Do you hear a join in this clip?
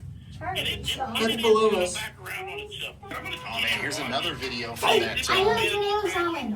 yes; 1 cut; at 3.1 s

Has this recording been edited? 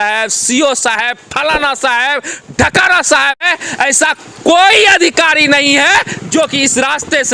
yes; 1 cut; at 3.4 s

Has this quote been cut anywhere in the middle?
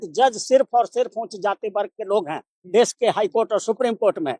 no; 0 cuts

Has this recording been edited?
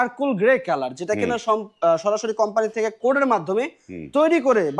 no; 0 cuts

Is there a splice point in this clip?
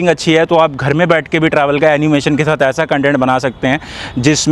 no; 0 cuts

